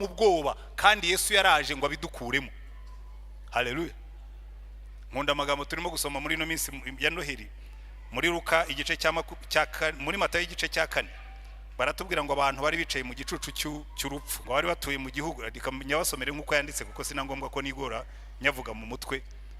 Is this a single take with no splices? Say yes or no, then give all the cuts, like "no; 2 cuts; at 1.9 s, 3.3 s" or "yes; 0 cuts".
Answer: no; 1 cut; at 14.3 s